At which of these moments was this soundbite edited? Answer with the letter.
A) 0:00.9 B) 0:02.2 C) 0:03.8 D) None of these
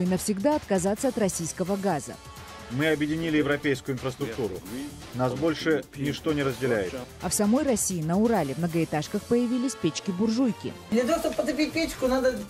D